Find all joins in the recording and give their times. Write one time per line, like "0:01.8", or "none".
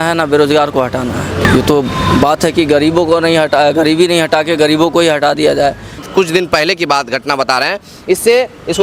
0:01.4
0:05.9

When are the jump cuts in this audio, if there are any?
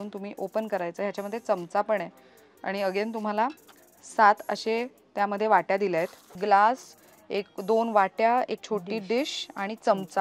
0:06.2

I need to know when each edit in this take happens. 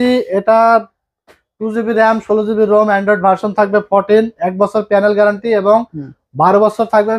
none

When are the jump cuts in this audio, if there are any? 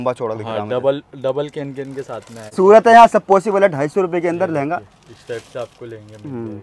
0:02.5

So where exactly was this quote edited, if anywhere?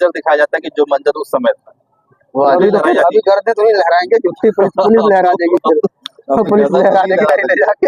0:02.6

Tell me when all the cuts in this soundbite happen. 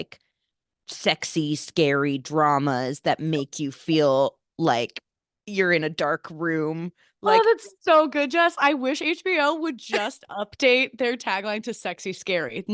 none

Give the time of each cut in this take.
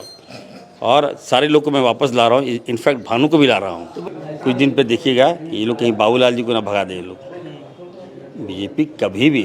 0:03.9

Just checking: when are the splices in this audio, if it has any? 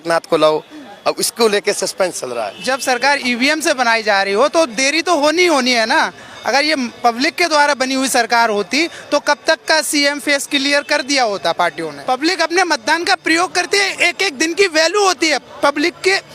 0:02.5
0:11.9

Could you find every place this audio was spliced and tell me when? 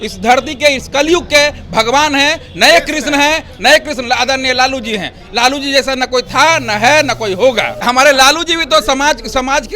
0:07.7

